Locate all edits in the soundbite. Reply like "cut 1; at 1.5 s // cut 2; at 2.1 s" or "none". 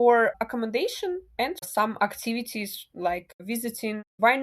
cut 1; at 1.6 s // cut 2; at 3.3 s